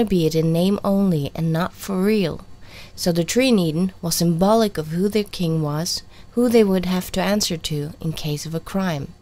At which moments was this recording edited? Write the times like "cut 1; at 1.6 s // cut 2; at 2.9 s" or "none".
cut 1; at 4.9 s